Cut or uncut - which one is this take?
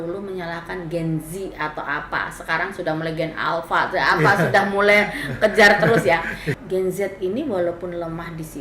cut